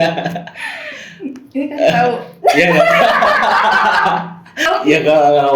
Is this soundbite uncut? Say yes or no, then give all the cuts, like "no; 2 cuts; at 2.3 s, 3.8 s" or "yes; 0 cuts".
no; 1 cut; at 4.6 s